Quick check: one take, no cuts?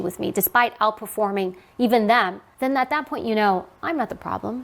no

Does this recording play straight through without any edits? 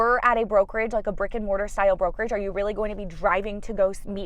yes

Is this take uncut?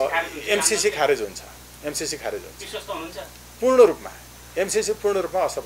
yes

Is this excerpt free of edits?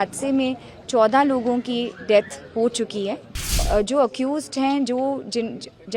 no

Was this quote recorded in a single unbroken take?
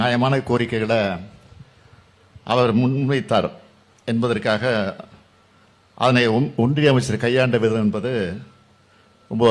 yes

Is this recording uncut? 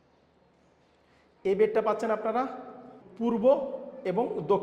yes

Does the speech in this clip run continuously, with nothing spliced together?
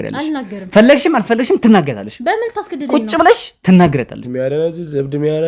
no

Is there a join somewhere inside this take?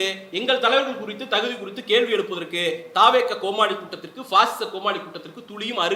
no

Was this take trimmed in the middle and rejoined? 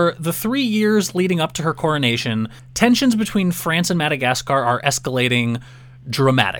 yes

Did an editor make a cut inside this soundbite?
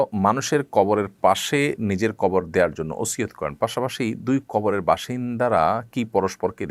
no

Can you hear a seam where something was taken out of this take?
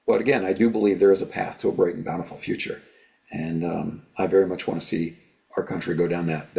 no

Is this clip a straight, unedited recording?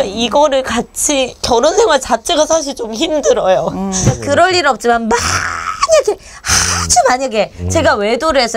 no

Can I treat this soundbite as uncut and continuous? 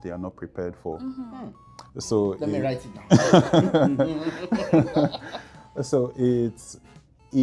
yes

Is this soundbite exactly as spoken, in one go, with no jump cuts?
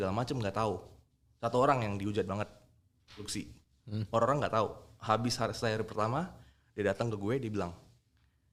yes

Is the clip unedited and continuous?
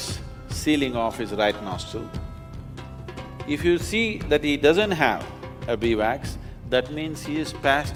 yes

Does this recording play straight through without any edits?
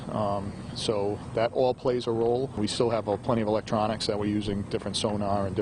no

